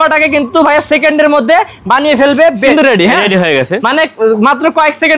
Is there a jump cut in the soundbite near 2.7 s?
yes; 1 cut; at 2.7 s

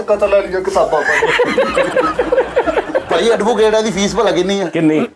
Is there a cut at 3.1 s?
yes; 1 cut; at 3.1 s

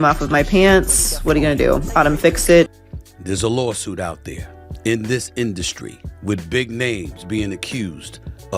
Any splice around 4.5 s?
no; 1 cut; at 2.8 s

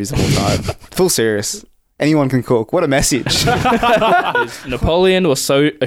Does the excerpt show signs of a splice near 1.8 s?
no; 1 cut; at 4.6 s

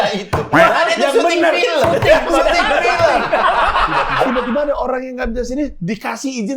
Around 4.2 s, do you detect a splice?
yes; 1 cut; at 4.2 s

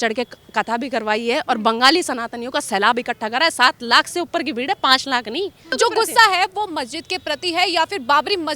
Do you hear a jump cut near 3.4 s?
no; 1 cut; at 5.7 s

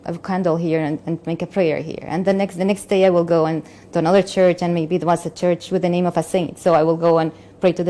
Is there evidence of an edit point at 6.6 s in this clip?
no; 0 cuts

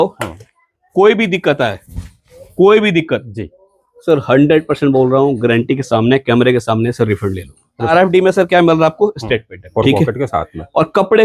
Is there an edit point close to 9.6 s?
yes; 2 cuts; at 7.9 s, 9.6 s

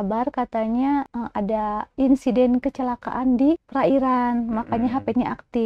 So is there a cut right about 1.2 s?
yes; 2 cuts; at 1.2 s, 3.7 s

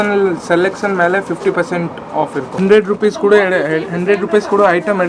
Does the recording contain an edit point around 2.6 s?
yes; 1 cut; at 2.6 s

